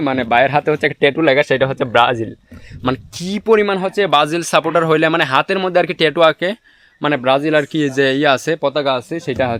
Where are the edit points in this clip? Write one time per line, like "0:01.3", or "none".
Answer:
none